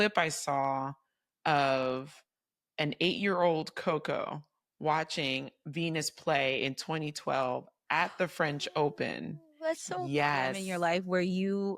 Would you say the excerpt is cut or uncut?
cut